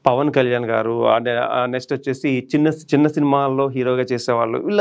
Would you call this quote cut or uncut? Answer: uncut